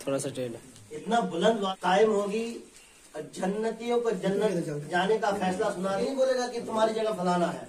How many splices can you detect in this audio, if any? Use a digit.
2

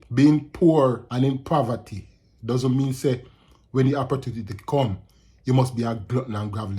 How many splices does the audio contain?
1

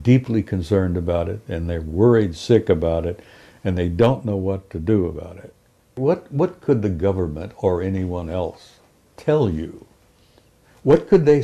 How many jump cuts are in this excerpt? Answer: 1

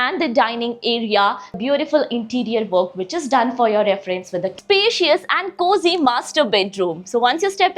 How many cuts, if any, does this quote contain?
2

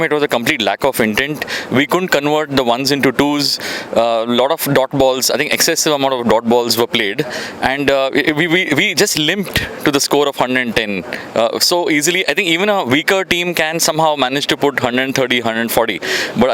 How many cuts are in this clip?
0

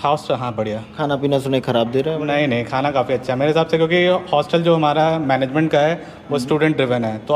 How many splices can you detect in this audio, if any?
0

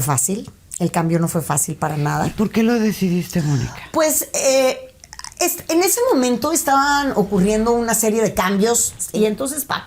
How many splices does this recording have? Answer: 1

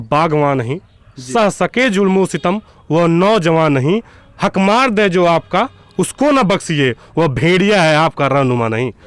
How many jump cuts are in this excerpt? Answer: 0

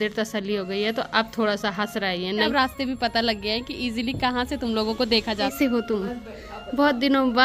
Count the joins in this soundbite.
2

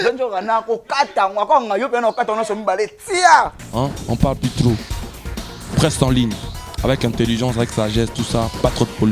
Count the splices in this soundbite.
1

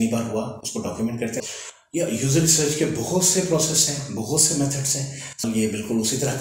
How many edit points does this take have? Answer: 2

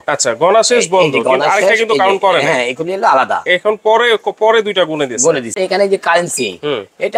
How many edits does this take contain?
1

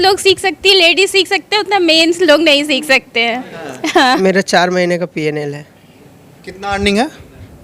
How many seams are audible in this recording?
1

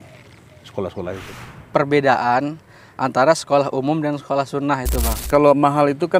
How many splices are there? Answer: 2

